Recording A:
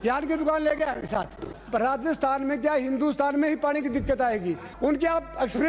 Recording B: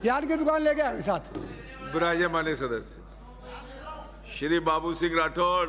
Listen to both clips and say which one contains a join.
A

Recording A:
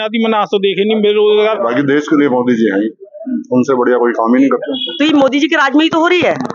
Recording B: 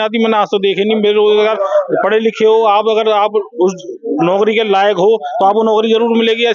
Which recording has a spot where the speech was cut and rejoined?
A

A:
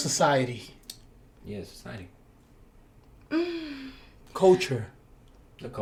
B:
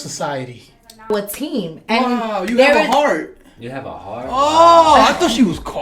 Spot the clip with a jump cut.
B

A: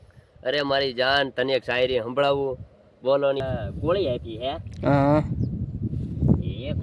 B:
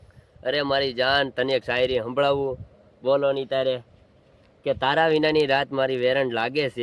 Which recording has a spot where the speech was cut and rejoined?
A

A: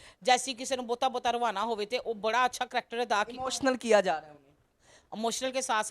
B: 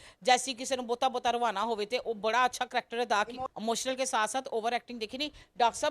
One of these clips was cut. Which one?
B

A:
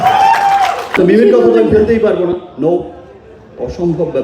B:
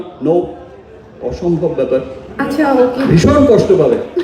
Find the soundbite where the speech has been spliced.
A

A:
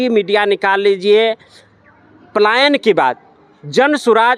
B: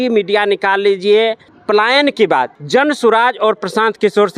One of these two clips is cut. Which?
B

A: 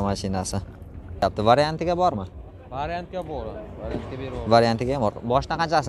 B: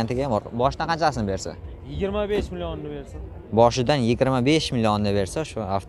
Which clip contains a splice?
A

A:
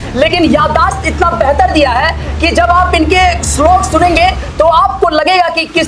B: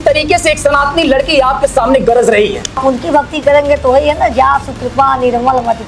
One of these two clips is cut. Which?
B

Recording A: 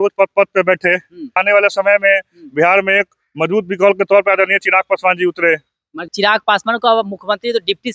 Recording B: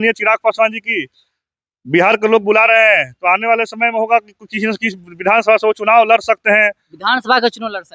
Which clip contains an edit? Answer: A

